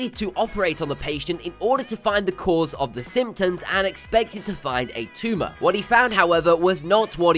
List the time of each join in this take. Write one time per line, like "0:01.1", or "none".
0:02.0